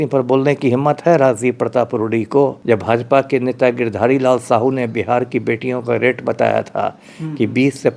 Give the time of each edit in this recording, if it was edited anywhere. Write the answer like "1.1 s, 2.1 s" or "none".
2.6 s